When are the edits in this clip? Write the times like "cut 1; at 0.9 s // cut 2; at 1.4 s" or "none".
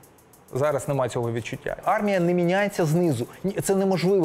cut 1; at 1.8 s